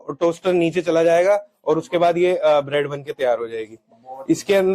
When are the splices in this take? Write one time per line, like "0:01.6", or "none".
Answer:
none